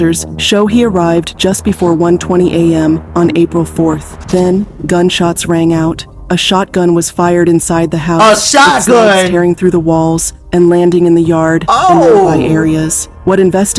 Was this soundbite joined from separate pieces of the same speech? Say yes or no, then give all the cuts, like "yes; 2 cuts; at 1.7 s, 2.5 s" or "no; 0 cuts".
no; 0 cuts